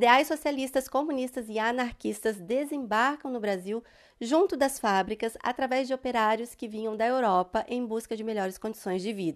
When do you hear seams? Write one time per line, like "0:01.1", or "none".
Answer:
none